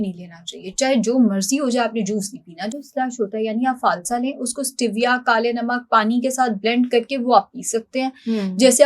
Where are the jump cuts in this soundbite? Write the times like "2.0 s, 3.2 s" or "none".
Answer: none